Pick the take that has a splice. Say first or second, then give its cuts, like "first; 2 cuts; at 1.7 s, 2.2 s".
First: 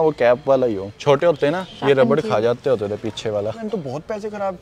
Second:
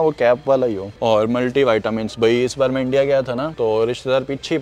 first; 2 cuts; at 0.9 s, 3.6 s